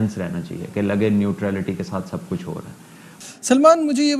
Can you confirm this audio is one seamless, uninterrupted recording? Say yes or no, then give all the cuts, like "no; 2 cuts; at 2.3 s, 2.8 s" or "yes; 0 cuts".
yes; 0 cuts